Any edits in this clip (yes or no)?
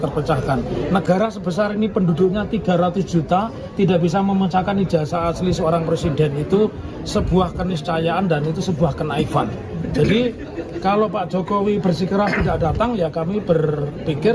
no